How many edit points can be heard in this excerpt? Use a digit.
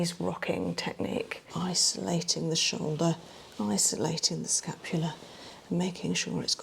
1